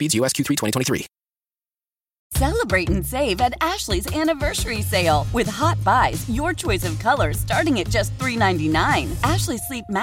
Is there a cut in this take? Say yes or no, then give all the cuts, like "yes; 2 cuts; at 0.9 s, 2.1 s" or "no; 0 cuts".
yes; 1 cut; at 2.2 s